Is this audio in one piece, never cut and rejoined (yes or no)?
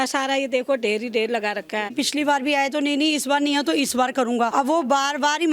no